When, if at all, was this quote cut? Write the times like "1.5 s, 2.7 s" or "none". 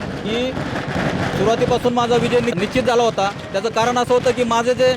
2.6 s